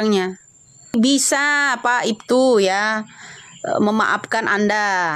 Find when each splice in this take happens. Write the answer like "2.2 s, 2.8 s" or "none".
0.9 s